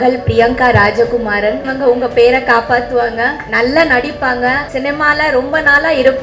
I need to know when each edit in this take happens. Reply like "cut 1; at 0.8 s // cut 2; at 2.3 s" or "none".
cut 1; at 1.7 s // cut 2; at 3.4 s // cut 3; at 4.7 s